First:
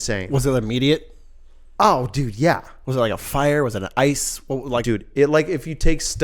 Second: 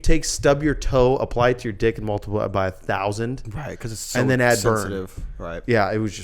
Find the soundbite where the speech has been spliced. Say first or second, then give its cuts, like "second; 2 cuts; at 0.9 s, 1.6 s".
first; 1 cut; at 4.8 s